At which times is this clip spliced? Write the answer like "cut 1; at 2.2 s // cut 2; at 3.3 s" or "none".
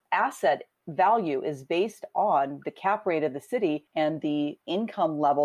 cut 1; at 3.9 s // cut 2; at 4.6 s